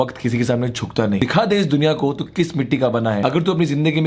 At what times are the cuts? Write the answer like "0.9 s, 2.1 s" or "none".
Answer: 1.2 s, 3.2 s